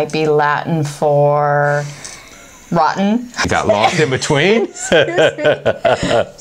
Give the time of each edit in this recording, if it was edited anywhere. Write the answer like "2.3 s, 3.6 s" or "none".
3.5 s